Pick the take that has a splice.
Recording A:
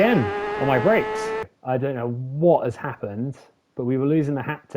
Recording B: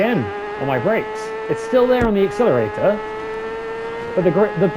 A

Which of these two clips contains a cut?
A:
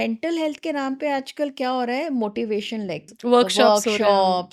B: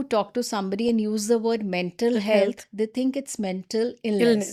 A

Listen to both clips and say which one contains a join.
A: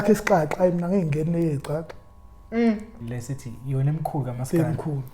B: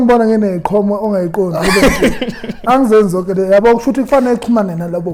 A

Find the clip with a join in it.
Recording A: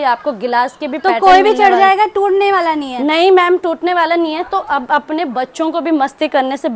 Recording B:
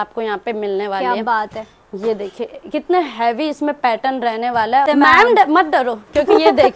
B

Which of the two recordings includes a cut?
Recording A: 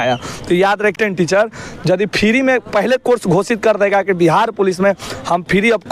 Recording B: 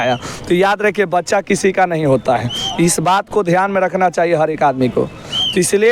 A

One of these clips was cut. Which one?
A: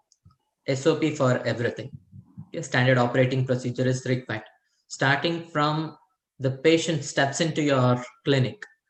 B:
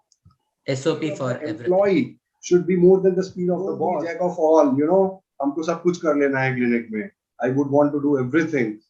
B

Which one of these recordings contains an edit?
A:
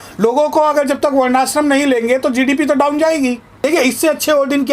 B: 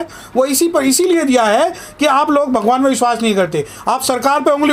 A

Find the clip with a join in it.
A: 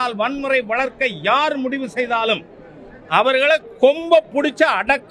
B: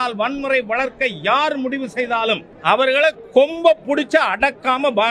B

